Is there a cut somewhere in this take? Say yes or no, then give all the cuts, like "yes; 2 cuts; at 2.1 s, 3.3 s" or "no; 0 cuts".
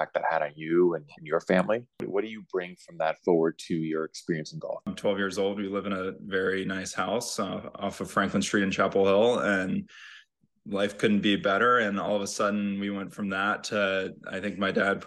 yes; 2 cuts; at 2.1 s, 4.9 s